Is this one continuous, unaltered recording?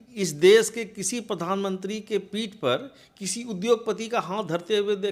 yes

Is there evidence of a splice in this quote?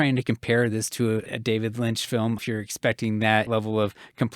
yes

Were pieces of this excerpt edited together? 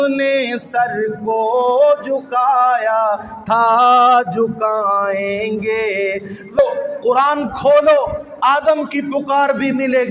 yes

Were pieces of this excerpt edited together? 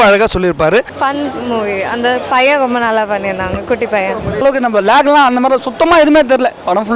yes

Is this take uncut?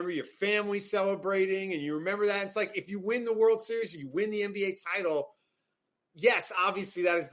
yes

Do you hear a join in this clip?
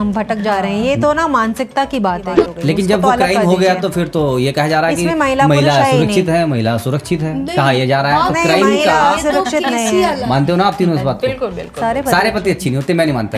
yes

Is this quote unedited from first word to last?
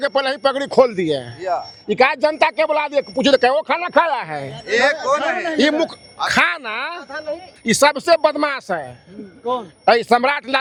yes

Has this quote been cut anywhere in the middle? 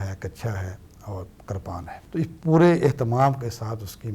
yes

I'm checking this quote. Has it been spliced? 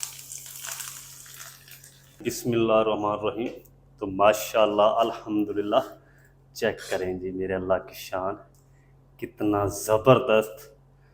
yes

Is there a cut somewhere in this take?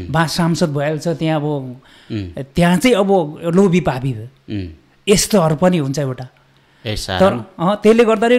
no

